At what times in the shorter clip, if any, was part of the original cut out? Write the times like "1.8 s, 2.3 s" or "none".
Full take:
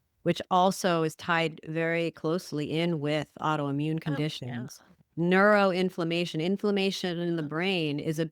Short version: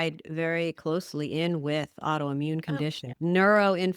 3.0 s